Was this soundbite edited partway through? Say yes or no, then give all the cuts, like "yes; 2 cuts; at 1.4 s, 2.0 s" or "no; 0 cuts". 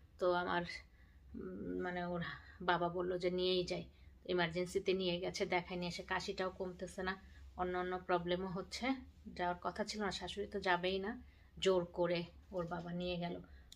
no; 0 cuts